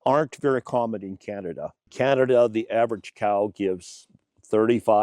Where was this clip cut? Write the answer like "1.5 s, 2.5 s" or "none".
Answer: 1.9 s